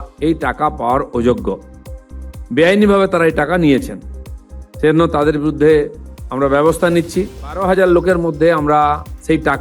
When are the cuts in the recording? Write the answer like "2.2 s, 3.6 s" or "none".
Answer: 7.6 s